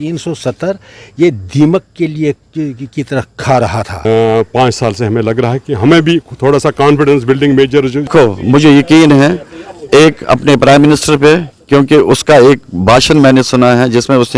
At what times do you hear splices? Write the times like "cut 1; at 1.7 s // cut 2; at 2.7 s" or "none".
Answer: cut 1; at 4.0 s // cut 2; at 8.1 s